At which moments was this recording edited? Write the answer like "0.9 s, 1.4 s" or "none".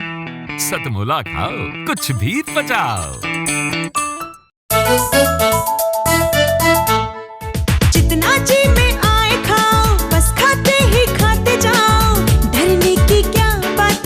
4.6 s